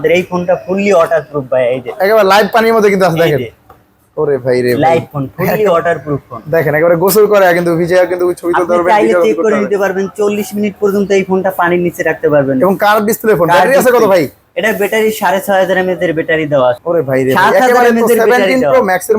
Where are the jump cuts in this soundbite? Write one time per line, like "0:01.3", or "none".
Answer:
0:16.8